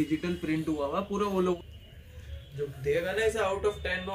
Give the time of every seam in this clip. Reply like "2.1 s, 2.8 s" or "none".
1.6 s